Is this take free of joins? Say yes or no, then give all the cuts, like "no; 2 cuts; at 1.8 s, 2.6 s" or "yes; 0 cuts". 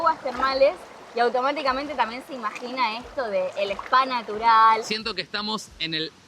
no; 1 cut; at 5.0 s